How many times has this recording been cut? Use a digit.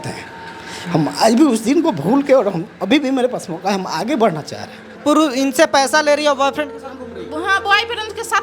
1